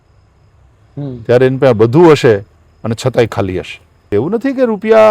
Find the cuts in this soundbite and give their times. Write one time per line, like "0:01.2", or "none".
0:04.0

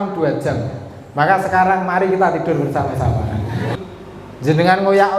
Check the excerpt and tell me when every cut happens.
0:03.8

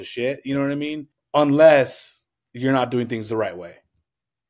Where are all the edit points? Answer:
0:01.1

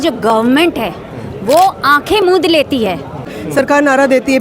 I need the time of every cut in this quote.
0:03.4

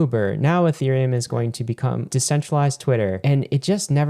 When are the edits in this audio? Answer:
0:02.1
0:03.2

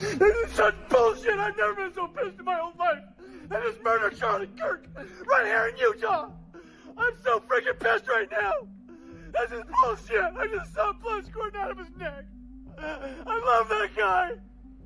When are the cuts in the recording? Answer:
0:01.5

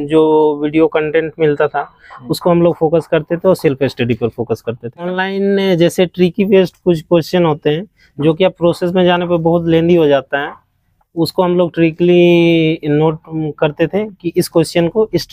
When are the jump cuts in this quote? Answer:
0:05.1

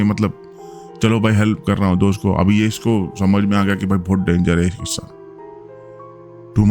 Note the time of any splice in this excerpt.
none

